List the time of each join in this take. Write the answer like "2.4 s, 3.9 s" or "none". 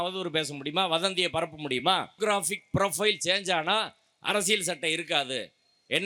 2.1 s